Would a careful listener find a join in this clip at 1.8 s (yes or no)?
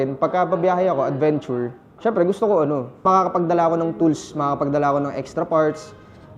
yes